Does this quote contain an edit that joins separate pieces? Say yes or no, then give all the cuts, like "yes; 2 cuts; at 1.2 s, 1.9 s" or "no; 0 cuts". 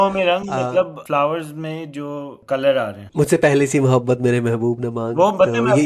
yes; 3 cuts; at 1.0 s, 2.4 s, 3.0 s